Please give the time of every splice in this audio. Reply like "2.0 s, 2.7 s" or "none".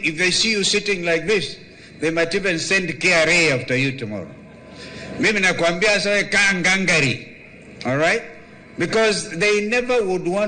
none